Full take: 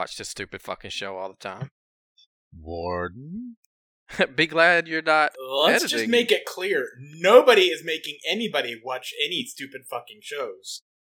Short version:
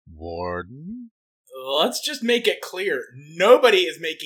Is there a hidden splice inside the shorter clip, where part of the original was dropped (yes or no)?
yes